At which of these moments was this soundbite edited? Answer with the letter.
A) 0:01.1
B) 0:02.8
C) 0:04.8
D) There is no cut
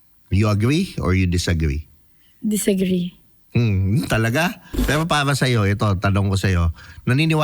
C